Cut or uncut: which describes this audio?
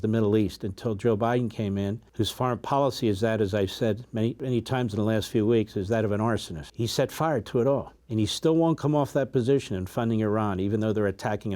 cut